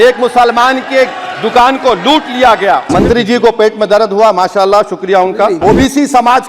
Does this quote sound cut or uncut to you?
cut